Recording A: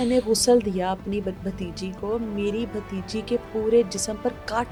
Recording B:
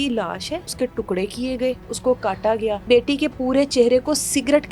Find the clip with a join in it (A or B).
B